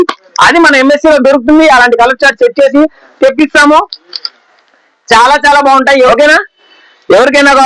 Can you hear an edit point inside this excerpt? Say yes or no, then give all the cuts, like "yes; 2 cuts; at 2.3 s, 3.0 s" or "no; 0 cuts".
yes; 1 cut; at 6.1 s